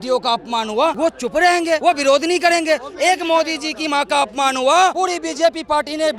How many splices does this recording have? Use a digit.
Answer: 3